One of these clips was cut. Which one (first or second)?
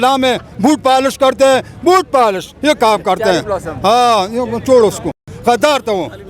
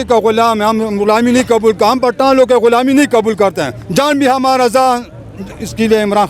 first